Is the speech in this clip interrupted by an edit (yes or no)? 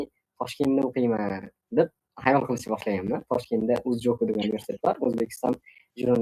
no